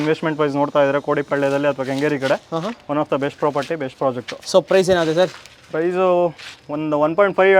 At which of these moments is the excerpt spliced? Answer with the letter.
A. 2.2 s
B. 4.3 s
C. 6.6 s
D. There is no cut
D